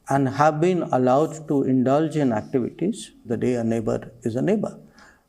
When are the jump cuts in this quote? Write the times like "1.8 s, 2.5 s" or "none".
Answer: 3.3 s